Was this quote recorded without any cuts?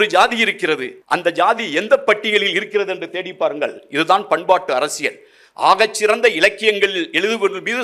no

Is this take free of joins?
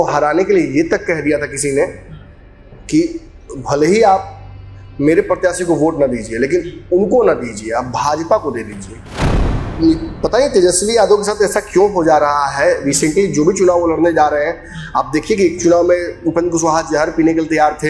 no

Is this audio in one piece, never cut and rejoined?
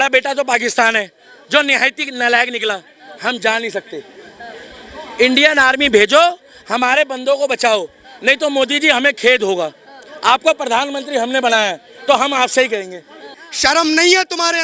no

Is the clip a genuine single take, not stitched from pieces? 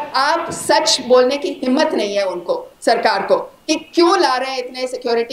yes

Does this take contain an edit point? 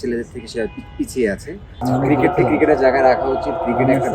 yes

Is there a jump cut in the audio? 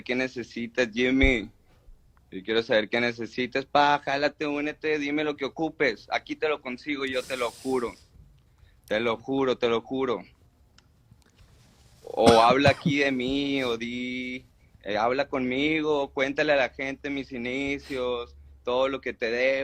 no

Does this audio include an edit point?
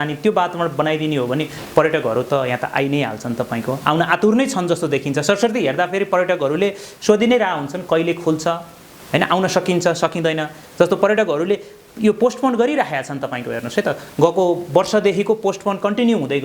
no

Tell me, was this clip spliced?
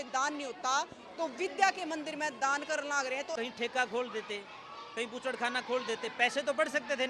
yes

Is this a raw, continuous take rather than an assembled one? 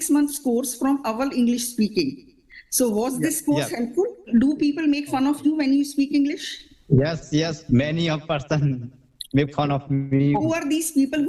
no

